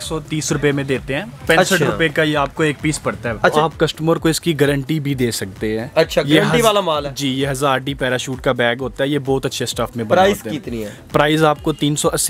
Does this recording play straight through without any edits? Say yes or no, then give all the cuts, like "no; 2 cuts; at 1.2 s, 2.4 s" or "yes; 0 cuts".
no; 1 cut; at 3.5 s